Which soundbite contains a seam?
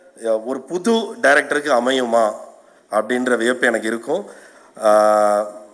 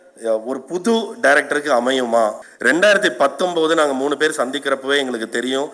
second; 1 cut; at 2.5 s

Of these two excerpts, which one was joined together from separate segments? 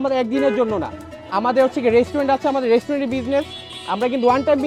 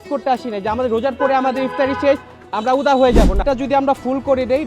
second; 1 cut; at 3.4 s

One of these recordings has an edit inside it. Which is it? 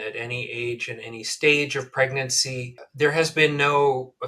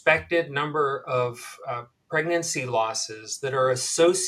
first; 1 cut; at 2.8 s

